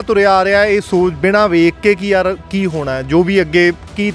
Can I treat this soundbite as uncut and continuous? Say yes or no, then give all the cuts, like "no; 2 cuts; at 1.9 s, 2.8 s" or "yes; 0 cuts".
yes; 0 cuts